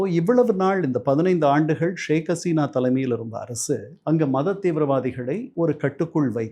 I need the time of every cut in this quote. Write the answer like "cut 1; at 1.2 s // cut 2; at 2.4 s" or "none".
cut 1; at 5.5 s